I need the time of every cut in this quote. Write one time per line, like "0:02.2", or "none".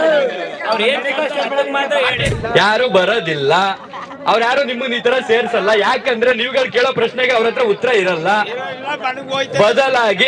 0:02.3